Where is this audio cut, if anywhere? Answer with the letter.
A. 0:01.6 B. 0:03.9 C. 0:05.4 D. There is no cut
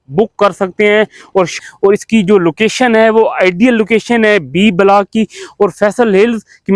A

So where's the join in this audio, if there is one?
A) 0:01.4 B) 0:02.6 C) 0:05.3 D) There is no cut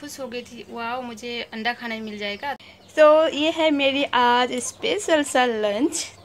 B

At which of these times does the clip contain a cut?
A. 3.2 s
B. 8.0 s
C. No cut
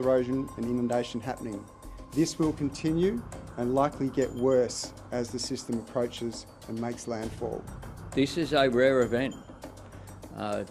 B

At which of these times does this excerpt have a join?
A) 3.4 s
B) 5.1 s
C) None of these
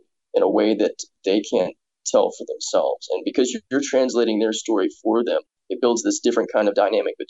A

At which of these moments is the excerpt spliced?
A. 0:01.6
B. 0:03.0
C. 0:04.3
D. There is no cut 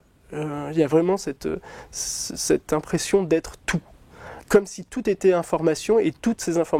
C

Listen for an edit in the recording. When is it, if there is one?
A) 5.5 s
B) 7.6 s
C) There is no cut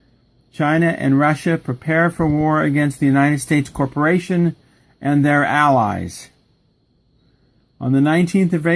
A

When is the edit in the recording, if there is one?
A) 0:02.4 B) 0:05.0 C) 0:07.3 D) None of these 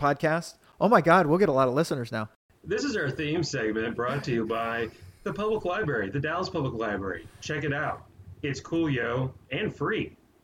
A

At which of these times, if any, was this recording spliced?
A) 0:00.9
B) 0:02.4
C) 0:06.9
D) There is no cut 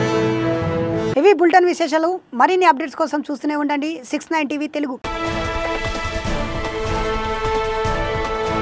D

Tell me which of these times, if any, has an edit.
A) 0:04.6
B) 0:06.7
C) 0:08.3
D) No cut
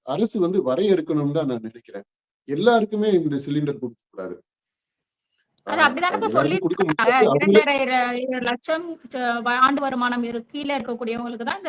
D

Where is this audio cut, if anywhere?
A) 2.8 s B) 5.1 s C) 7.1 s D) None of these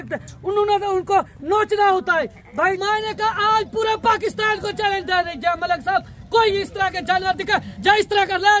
A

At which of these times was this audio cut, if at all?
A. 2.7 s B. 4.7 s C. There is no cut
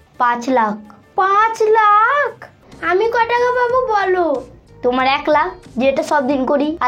A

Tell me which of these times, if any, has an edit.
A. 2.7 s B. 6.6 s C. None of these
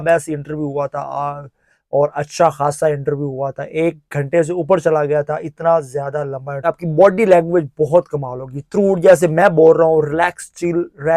B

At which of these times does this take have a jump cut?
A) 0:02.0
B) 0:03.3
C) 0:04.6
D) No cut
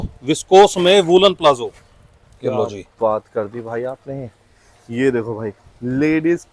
D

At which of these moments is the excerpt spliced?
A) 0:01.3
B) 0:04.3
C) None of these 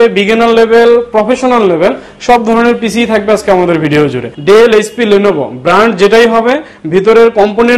B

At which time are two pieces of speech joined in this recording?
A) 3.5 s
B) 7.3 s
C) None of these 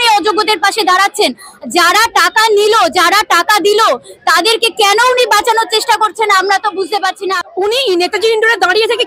B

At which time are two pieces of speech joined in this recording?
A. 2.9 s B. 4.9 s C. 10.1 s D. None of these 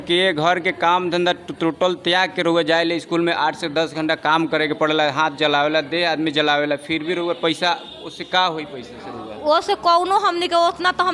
D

